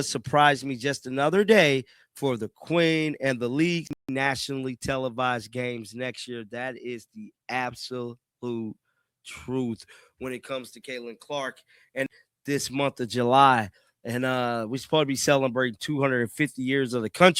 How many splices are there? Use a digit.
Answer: 2